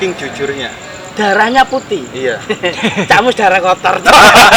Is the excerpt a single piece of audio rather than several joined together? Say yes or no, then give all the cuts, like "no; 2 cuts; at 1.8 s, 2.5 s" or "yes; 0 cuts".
yes; 0 cuts